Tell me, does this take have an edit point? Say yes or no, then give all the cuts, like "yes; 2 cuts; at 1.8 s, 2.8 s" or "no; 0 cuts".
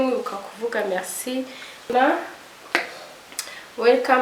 yes; 1 cut; at 1.9 s